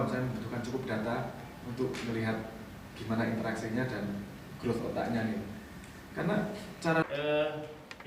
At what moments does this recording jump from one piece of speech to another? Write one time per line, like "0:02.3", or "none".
0:07.0